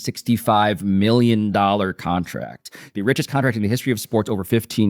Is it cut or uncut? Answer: uncut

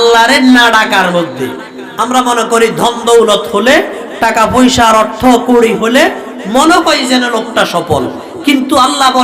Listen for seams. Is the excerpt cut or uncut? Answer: uncut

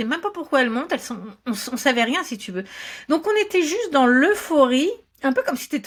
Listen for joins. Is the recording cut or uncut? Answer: uncut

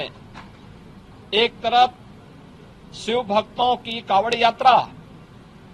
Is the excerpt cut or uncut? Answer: uncut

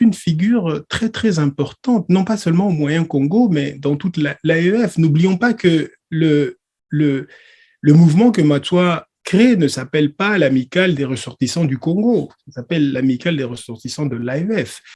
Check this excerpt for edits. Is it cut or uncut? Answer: uncut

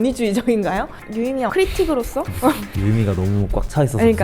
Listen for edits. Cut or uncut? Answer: cut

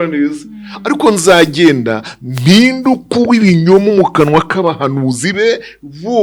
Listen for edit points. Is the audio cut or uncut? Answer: uncut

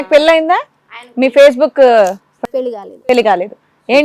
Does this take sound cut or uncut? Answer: uncut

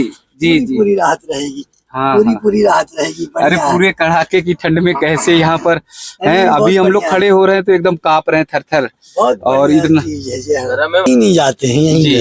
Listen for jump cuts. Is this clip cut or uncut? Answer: cut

